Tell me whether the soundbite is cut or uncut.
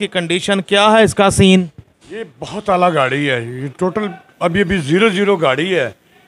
uncut